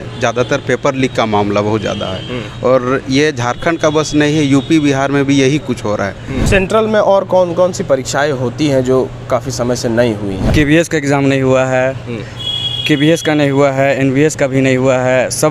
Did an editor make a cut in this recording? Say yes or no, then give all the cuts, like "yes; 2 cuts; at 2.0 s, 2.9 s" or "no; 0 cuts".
yes; 2 cuts; at 6.4 s, 10.4 s